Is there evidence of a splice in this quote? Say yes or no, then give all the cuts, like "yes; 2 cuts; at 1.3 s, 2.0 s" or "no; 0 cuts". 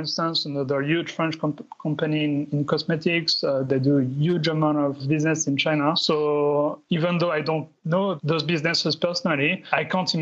no; 0 cuts